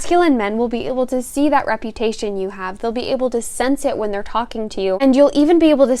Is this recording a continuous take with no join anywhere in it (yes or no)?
no